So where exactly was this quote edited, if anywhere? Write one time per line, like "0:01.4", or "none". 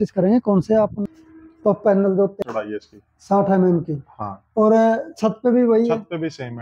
0:01.1